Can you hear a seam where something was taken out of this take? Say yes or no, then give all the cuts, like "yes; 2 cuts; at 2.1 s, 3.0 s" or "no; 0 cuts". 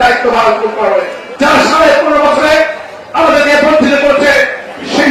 yes; 1 cut; at 1.2 s